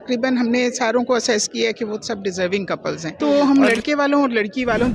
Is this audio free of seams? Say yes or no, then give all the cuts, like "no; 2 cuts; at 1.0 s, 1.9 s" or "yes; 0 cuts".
no; 1 cut; at 3.1 s